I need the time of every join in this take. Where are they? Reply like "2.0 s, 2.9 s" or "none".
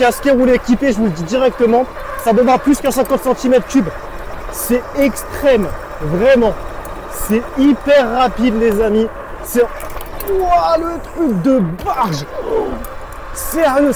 none